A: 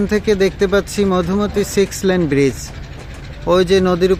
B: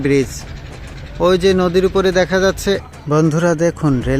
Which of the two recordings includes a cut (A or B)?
B